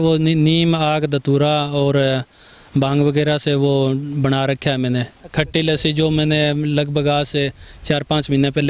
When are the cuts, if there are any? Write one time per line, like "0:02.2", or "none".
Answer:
0:05.2